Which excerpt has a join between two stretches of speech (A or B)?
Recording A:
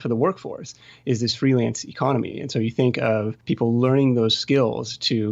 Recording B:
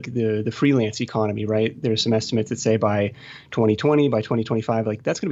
A